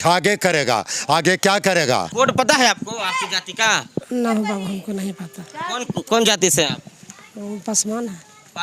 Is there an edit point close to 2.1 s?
yes; 1 cut; at 2.1 s

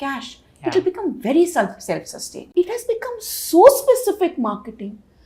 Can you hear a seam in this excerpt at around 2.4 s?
yes; 1 cut; at 2.4 s

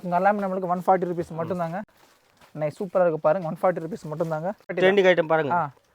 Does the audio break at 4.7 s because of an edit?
yes; 1 cut; at 4.7 s

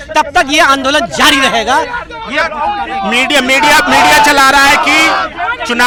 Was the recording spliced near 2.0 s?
no; 0 cuts

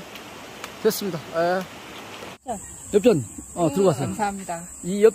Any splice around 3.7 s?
no; 1 cut; at 2.5 s

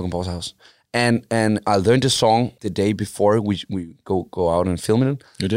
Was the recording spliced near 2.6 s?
yes; 1 cut; at 2.6 s

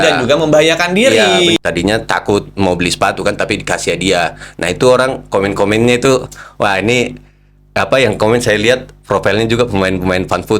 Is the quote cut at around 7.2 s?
no; 1 cut; at 1.6 s

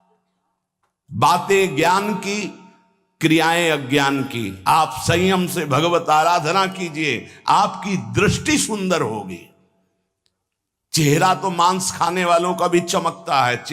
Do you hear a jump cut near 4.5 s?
yes; 1 cut; at 4.5 s

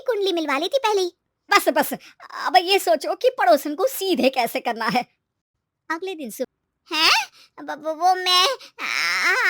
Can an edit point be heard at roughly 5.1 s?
no; 2 cuts; at 1.5 s, 6.5 s

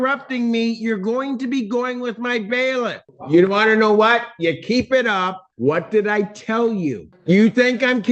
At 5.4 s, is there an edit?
yes; 3 cuts; at 3.1 s, 5.4 s, 7.1 s

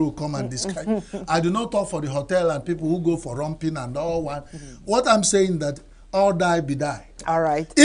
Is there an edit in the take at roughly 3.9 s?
no; 0 cuts

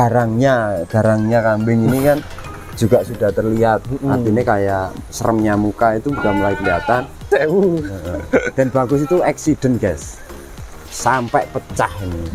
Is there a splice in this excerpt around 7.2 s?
yes; 1 cut; at 7.2 s

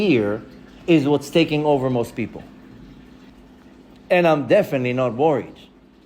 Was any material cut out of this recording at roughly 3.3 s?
yes; 1 cut; at 3.3 s

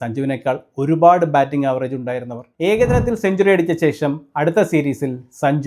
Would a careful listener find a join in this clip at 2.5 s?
yes; 1 cut; at 2.5 s

